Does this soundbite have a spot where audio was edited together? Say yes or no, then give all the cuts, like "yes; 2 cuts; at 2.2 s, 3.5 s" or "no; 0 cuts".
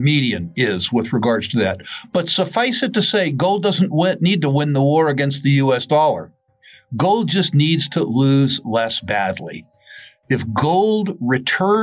no; 0 cuts